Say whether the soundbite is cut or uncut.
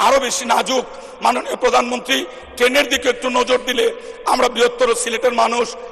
uncut